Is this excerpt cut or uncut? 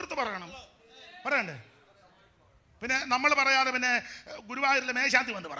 uncut